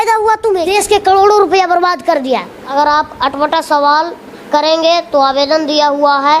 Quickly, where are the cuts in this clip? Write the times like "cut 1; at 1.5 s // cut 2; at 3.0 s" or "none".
cut 1; at 0.7 s // cut 2; at 2.7 s